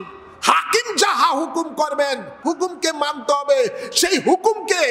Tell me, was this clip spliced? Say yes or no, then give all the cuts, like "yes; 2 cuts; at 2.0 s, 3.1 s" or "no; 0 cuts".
yes; 1 cut; at 2.3 s